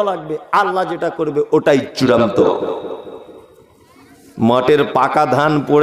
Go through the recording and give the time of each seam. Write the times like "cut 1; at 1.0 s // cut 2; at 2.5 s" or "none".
none